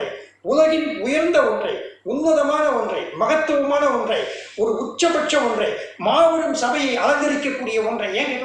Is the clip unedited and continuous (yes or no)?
yes